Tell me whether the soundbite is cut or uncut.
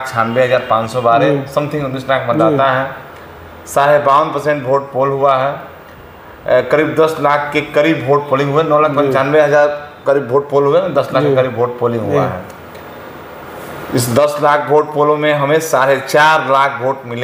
uncut